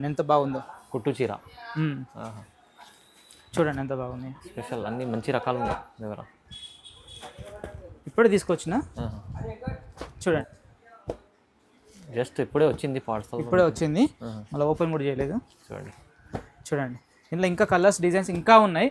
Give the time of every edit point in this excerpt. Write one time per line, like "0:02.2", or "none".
0:10.4